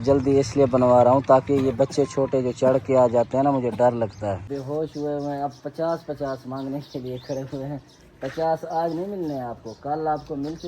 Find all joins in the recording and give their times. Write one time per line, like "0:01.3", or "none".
0:04.5